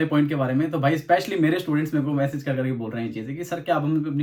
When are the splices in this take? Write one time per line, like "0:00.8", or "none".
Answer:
none